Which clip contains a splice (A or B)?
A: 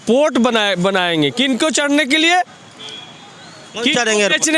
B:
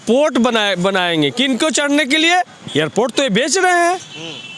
B